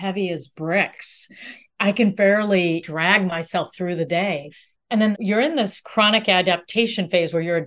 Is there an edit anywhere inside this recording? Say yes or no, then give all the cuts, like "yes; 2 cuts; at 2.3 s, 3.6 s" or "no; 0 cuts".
yes; 2 cuts; at 2.8 s, 4.8 s